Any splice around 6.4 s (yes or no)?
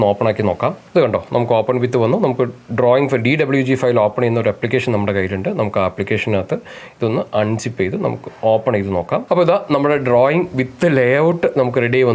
no